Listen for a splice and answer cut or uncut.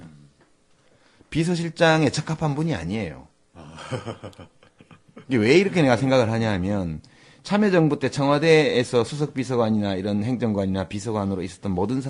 uncut